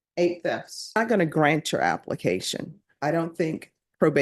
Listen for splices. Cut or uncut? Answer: cut